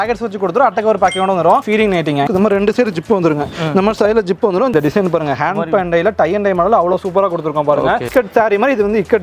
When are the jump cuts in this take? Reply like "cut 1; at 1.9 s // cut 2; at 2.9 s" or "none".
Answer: cut 1; at 2.2 s // cut 2; at 4.7 s // cut 3; at 8.1 s